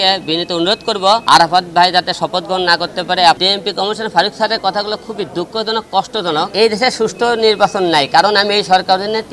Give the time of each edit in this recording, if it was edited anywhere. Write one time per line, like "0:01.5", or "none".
0:01.2
0:03.4
0:06.5